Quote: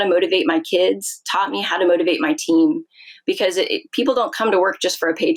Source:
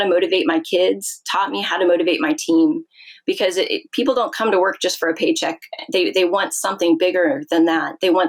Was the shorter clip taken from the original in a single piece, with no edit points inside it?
yes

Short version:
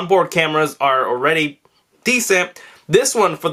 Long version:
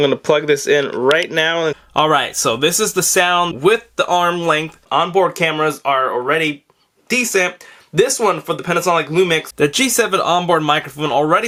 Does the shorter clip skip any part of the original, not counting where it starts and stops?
no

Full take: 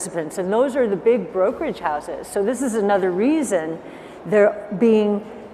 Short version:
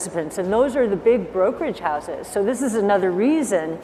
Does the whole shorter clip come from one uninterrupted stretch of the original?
yes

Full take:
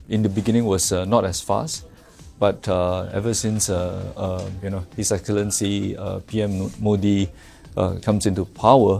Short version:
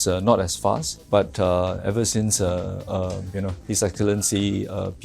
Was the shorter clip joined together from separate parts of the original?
yes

